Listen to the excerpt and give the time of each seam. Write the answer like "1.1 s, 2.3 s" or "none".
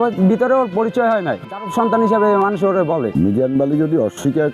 1.5 s, 3.1 s